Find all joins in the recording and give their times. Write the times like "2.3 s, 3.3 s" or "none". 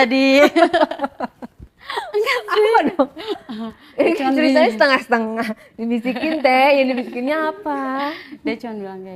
none